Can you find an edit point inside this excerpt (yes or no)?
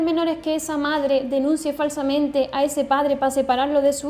no